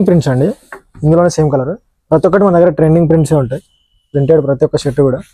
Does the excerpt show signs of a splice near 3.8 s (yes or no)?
no